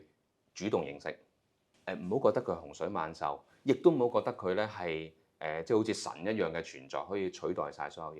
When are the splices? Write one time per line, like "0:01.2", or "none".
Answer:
none